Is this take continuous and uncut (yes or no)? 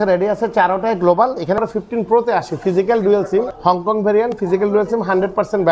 no